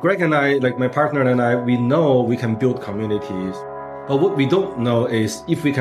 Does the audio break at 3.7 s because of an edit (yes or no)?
yes